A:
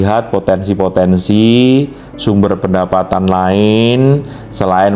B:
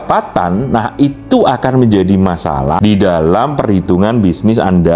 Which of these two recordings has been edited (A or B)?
B